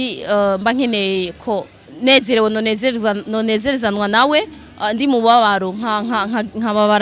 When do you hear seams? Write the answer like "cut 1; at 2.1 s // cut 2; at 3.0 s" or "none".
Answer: cut 1; at 1.8 s